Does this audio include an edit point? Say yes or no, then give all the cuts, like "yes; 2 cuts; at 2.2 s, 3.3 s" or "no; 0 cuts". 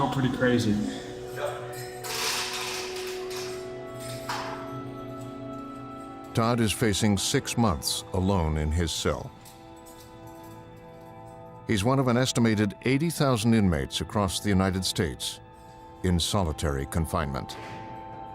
yes; 1 cut; at 9.7 s